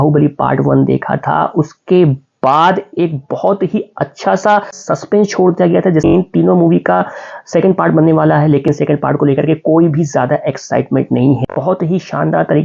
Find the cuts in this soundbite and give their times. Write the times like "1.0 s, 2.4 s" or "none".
6.1 s, 11.4 s